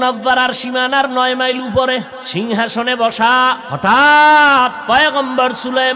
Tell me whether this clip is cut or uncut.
cut